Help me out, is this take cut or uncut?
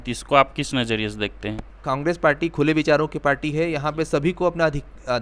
cut